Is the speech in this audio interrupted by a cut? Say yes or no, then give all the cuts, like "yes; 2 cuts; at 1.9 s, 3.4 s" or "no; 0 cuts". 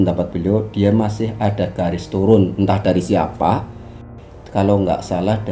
no; 0 cuts